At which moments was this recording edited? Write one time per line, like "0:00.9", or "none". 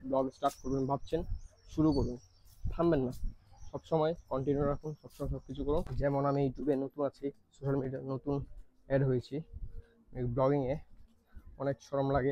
0:05.9